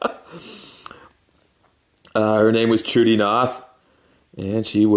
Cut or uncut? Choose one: uncut